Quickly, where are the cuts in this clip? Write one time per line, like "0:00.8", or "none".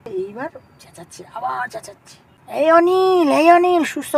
0:02.6